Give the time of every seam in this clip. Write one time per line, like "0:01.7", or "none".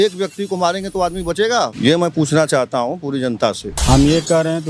0:01.7
0:03.7

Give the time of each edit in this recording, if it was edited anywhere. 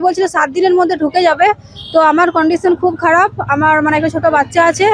none

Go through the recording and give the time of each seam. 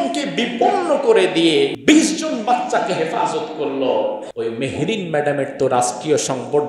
0:01.8
0:04.3

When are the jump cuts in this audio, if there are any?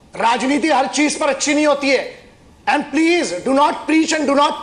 none

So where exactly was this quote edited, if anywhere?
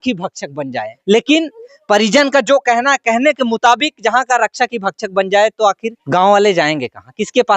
0:00.9
0:05.9

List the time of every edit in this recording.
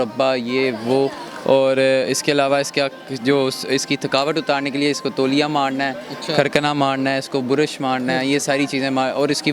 none

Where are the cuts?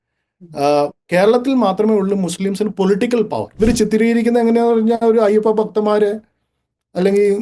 0:03.5

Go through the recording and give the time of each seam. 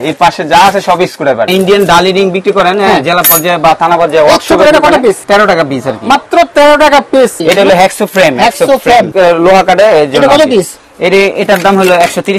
0:01.5
0:05.2
0:07.4
0:09.1

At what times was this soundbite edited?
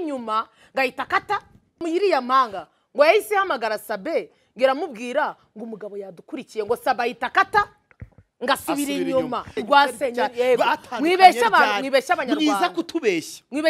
0:01.8
0:09.6

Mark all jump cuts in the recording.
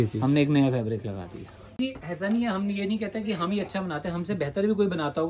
0:01.8

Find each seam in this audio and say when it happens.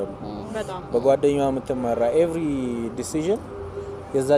none

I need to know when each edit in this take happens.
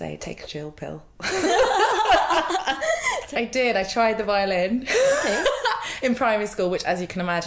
0:03.2

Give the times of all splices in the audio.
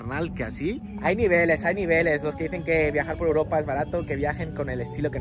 none

